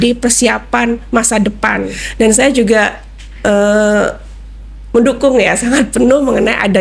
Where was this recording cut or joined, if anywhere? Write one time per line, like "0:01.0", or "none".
0:01.9